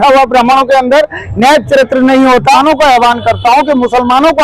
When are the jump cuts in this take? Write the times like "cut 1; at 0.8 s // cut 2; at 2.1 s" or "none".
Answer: cut 1; at 2.6 s